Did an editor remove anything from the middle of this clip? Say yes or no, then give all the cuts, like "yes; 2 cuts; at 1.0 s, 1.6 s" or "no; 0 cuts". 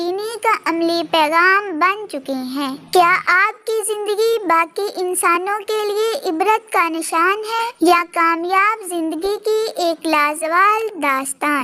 no; 0 cuts